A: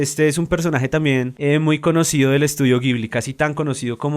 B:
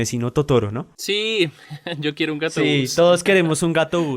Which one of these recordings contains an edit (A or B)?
A